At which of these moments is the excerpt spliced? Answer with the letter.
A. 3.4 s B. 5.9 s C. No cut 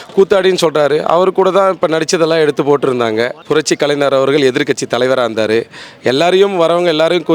A